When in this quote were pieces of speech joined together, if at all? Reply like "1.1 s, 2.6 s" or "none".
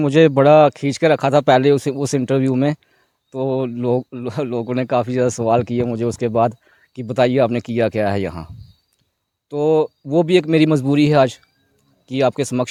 none